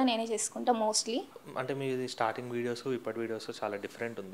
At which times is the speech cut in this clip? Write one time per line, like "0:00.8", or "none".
0:01.4